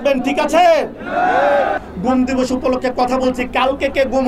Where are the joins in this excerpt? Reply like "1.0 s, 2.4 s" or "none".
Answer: 1.8 s

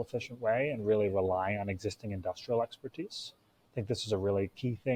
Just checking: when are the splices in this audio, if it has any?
none

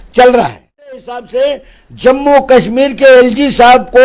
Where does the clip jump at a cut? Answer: 1.3 s

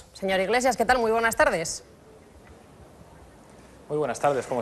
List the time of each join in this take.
none

